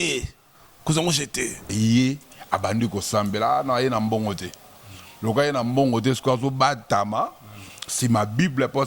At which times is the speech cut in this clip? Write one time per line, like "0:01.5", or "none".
0:01.7